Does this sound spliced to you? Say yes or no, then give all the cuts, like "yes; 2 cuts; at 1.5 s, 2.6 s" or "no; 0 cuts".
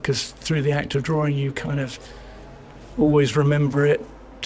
no; 0 cuts